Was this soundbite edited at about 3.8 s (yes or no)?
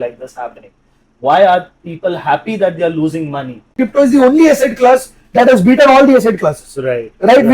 yes